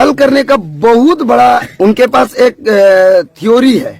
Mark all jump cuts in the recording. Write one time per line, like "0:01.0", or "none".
0:01.7